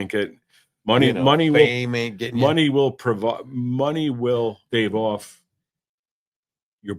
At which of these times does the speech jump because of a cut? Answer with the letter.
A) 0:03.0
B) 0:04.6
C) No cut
B